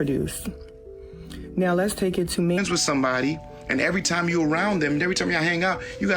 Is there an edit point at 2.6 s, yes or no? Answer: yes